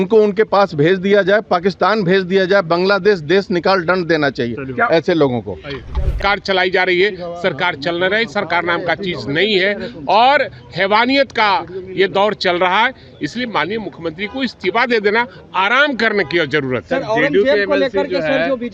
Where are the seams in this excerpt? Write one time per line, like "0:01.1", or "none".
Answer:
0:06.2